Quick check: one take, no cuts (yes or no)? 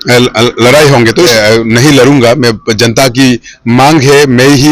no